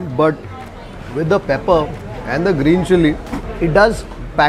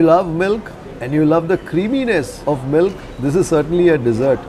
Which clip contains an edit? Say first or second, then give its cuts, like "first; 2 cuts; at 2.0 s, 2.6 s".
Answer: second; 1 cut; at 2.3 s